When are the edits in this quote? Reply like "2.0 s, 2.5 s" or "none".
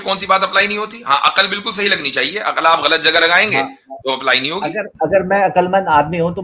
none